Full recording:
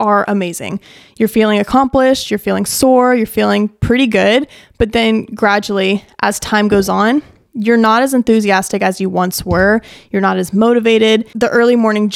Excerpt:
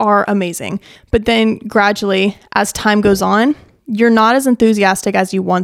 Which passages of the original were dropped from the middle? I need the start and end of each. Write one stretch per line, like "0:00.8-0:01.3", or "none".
0:00.9-0:04.6